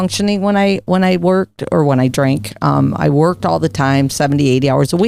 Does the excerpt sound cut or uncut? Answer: uncut